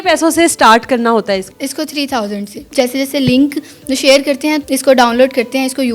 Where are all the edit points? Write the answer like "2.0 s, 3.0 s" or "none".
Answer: 1.5 s, 2.7 s, 4.6 s